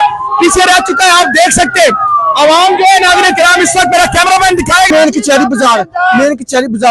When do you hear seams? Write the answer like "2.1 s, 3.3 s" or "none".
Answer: 4.9 s